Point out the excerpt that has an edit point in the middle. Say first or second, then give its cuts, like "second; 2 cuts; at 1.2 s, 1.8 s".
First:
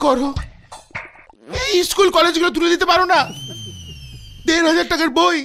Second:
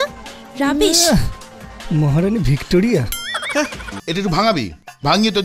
second; 1 cut; at 3.9 s